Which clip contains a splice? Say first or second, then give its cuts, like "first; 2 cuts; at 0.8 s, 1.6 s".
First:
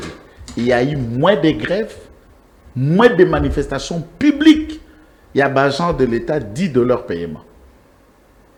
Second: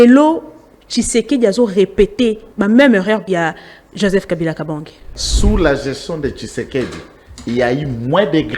second; 3 cuts; at 2.5 s, 3.3 s, 5.2 s